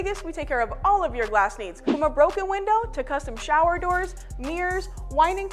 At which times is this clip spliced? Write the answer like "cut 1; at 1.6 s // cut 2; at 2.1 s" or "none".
cut 1; at 1.9 s // cut 2; at 3.0 s // cut 3; at 4.6 s

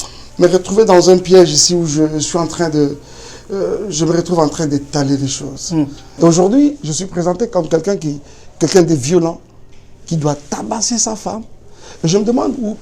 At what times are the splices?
cut 1; at 6.0 s

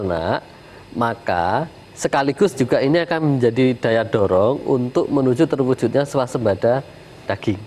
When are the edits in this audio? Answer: none

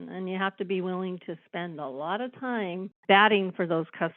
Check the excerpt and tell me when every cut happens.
cut 1; at 3.0 s

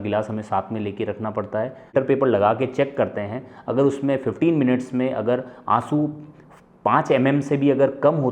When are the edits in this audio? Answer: cut 1; at 1.9 s

